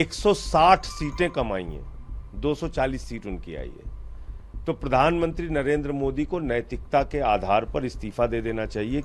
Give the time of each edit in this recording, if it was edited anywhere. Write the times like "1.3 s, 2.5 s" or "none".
none